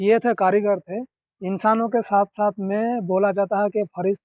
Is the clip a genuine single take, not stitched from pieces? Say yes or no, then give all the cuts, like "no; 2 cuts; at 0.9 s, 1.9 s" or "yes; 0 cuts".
yes; 0 cuts